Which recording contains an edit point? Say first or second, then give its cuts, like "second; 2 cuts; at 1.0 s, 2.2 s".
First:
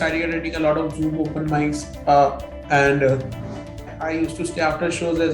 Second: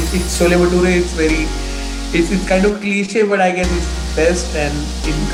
first; 1 cut; at 3.9 s